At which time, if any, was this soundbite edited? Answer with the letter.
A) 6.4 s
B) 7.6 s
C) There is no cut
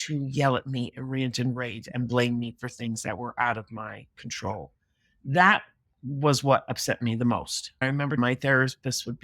B